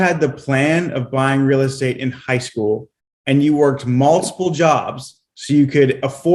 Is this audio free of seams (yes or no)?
yes